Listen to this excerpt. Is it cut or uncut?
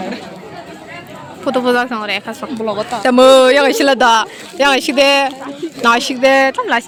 uncut